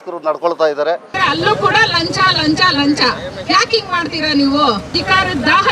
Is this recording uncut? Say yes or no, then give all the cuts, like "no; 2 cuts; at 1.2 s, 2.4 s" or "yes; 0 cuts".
no; 2 cuts; at 1.1 s, 5.0 s